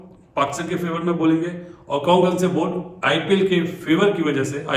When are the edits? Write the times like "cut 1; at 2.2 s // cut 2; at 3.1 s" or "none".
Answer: none